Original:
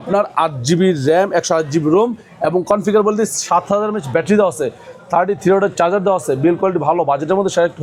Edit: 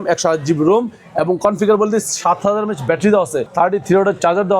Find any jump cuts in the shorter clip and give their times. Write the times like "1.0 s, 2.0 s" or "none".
3.4 s